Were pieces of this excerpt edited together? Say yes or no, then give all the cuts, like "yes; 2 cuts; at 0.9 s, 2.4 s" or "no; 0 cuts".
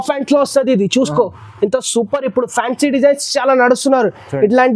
no; 0 cuts